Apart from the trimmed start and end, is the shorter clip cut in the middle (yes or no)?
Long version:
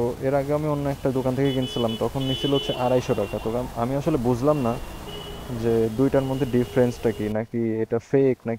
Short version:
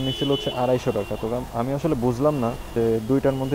yes